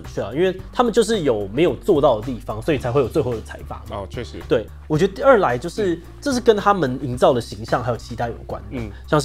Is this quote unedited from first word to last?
yes; 0 cuts

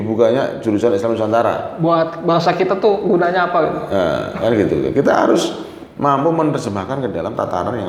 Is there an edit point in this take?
no; 0 cuts

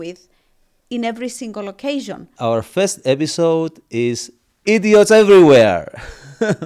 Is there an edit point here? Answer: yes; 1 cut; at 2.3 s

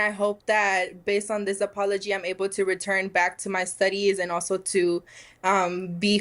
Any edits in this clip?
no; 0 cuts

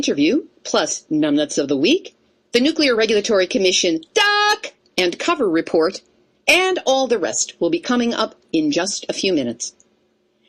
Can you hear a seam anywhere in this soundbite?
no; 0 cuts

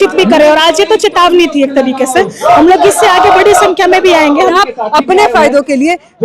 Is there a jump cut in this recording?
yes; 1 cut; at 4.6 s

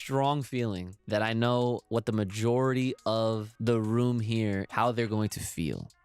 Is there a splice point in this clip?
yes; 4 cuts; at 0.9 s, 1.8 s, 3.5 s, 4.7 s

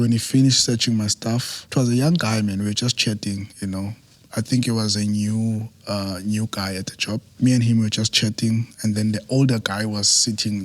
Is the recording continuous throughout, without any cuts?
no; 2 cuts; at 1.6 s, 7.3 s

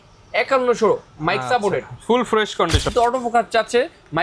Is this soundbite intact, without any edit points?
no; 1 cut; at 2.9 s

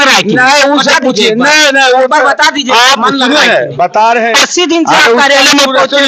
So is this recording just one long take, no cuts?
yes; 0 cuts

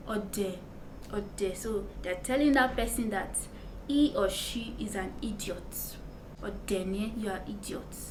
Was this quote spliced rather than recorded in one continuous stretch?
no; 0 cuts

